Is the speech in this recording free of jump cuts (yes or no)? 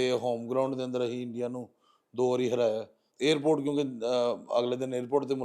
no